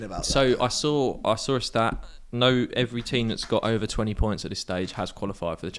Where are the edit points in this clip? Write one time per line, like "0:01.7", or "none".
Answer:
none